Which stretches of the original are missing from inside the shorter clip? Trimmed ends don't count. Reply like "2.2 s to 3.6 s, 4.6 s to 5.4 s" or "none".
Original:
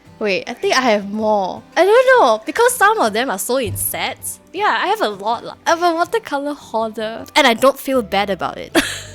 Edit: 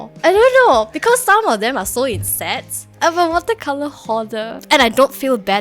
4.4 s to 5.5 s